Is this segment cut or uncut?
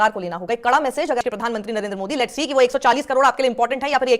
cut